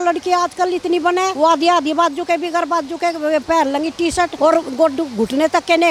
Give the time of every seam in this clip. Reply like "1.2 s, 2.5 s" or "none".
none